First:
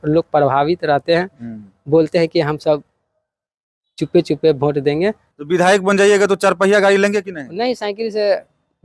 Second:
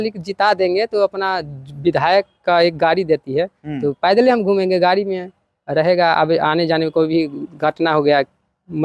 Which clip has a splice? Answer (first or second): first